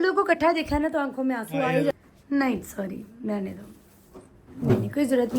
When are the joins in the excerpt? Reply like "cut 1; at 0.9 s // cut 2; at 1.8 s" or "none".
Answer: cut 1; at 1.9 s